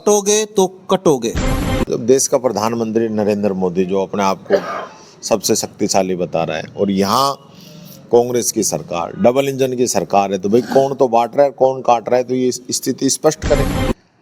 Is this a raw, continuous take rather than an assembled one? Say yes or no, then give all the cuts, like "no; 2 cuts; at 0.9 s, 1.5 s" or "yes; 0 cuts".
no; 1 cut; at 1.9 s